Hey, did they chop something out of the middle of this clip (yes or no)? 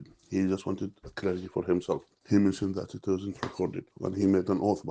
yes